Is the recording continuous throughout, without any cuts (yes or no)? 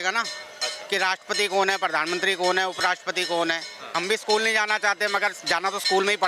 no